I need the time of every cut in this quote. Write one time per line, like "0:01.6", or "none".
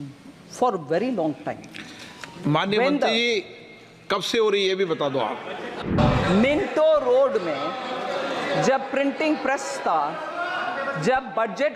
0:05.8